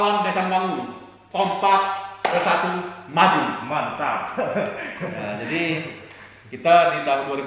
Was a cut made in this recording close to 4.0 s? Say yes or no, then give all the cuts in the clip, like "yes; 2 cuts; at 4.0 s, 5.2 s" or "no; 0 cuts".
no; 0 cuts